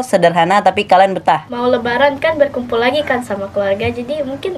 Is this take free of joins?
no; 1 cut; at 1.5 s

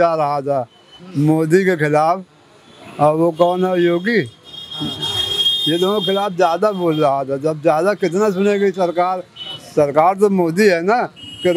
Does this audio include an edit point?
no; 0 cuts

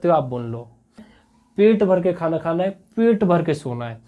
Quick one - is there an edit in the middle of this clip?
yes; 1 cut; at 1.1 s

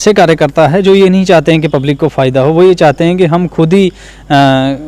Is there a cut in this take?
no; 0 cuts

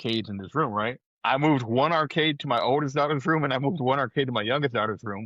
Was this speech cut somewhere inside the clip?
yes; 1 cut; at 1.1 s

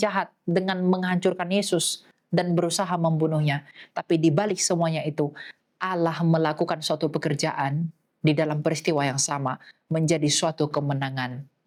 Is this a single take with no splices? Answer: yes; 0 cuts

